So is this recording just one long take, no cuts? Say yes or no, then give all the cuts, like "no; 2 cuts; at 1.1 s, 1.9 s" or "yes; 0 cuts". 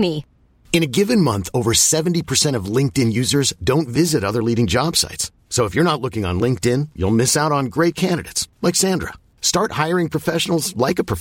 yes; 0 cuts